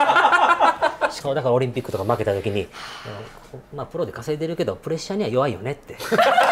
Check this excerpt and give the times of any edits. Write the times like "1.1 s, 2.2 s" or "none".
1.1 s